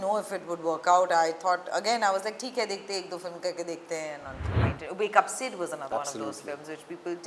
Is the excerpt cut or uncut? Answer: cut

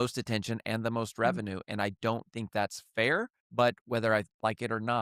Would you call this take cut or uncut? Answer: cut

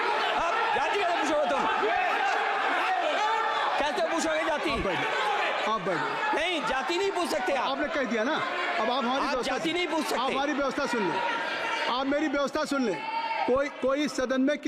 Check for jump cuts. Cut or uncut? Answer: uncut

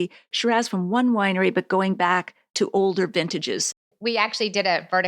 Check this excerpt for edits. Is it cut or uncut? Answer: cut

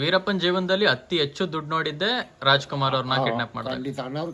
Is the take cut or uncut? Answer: uncut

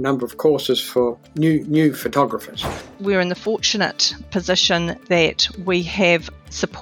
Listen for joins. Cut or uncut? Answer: cut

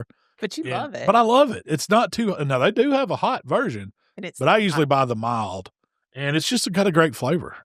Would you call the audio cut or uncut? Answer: uncut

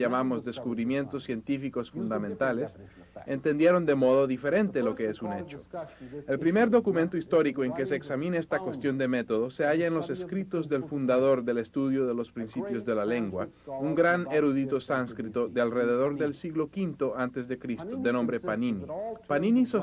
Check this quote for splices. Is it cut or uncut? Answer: cut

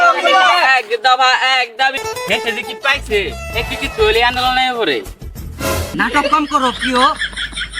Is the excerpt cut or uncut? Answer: cut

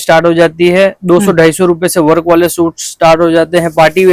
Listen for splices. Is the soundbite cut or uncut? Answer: uncut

